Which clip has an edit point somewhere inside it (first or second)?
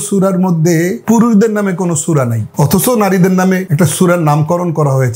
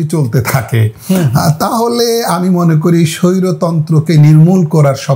first